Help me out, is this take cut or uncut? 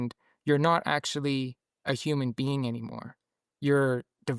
uncut